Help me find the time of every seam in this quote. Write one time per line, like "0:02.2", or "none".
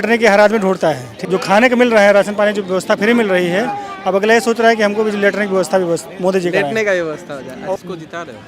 0:01.1
0:07.8